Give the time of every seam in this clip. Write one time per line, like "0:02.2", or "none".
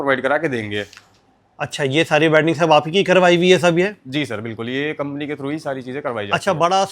none